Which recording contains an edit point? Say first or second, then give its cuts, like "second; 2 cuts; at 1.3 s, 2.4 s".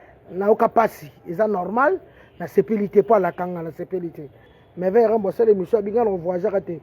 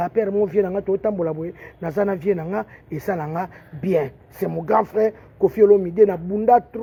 first; 1 cut; at 4.5 s